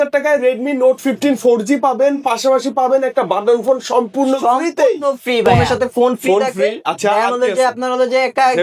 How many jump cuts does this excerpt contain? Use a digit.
1